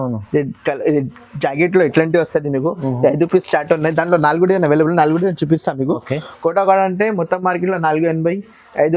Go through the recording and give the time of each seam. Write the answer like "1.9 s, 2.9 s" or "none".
none